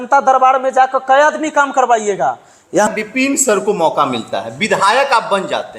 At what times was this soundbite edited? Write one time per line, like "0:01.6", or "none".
0:02.9